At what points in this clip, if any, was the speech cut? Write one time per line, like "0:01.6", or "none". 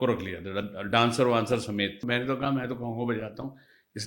0:02.0

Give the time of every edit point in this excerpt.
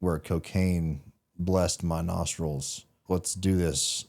0:03.0

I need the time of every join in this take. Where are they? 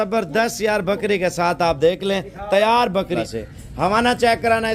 0:03.1

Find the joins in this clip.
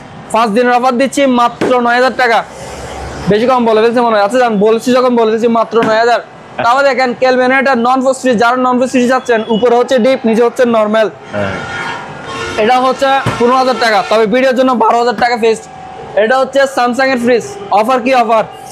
none

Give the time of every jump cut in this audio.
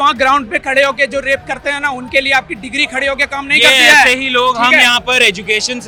none

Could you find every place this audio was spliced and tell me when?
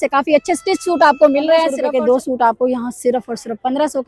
0:01.8

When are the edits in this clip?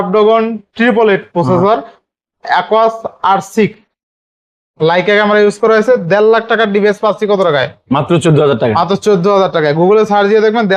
none

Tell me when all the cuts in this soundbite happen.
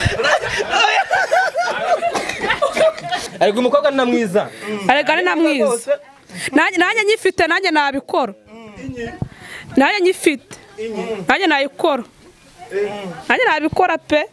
0:03.3

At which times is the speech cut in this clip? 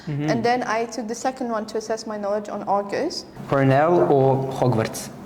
0:03.3

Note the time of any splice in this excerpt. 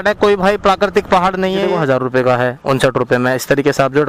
0:01.7

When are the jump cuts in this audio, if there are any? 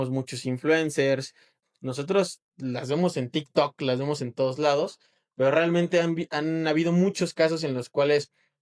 0:01.6

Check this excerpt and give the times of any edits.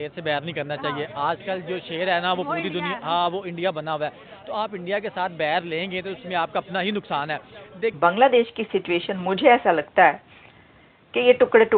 0:08.0

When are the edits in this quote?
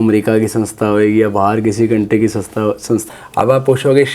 0:03.0

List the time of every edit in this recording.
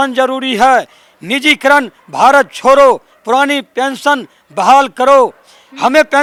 none

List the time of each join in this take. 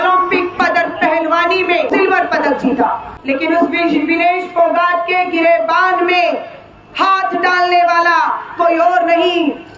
0:01.9
0:03.1

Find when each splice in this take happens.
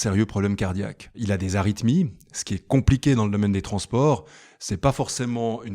0:01.2

